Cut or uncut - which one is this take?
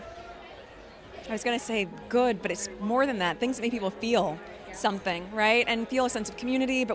uncut